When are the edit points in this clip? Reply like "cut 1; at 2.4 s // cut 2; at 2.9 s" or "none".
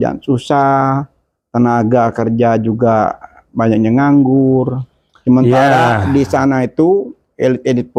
none